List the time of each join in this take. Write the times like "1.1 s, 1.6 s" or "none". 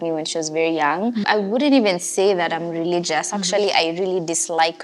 1.2 s